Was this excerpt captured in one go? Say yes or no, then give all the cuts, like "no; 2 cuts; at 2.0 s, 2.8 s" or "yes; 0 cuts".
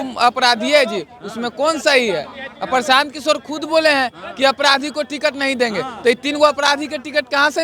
yes; 0 cuts